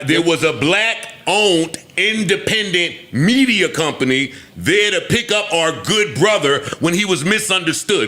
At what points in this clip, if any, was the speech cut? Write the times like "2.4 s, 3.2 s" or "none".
none